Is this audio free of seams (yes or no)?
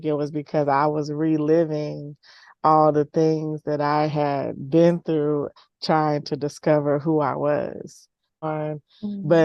no